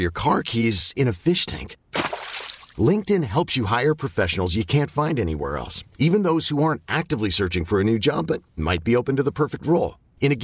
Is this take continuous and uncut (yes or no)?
yes